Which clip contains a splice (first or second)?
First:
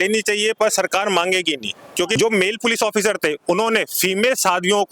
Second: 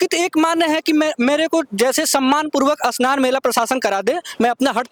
first